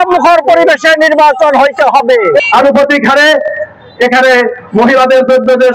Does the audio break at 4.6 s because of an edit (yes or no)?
no